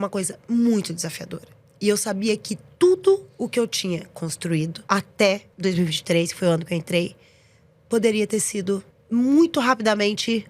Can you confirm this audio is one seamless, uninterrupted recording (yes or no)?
no